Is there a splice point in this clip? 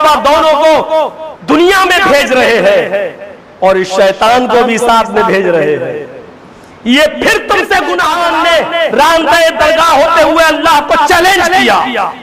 yes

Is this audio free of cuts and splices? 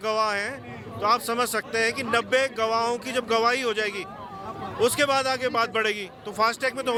yes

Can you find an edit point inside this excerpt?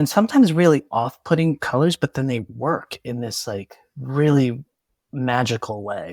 no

